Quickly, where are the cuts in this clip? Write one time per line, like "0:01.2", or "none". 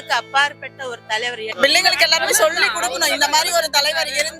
0:01.4